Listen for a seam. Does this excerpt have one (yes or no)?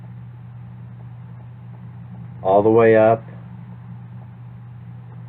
yes